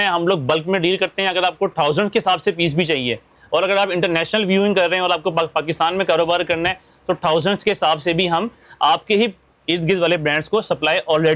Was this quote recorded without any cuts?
yes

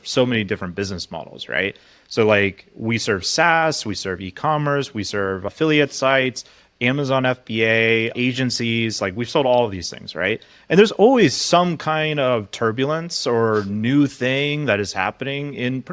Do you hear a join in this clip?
no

